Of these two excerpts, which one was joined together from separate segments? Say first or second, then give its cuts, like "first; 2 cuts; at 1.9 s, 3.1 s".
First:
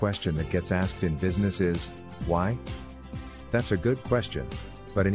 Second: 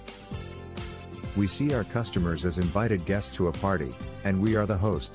second; 1 cut; at 1.3 s